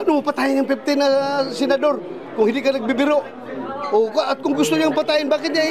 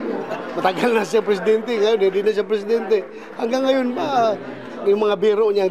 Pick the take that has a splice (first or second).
first